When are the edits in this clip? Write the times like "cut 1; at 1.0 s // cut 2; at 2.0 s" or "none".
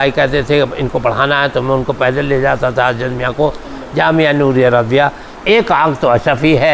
cut 1; at 5.3 s